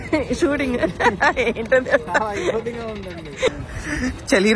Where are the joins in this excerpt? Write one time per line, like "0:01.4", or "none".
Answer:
0:03.5